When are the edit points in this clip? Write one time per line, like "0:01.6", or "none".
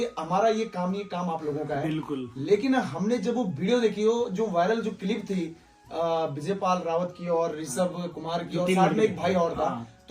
none